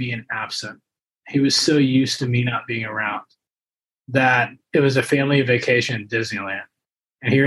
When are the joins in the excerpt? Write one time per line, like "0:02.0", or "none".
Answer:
none